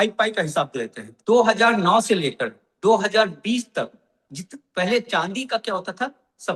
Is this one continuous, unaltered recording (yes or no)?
yes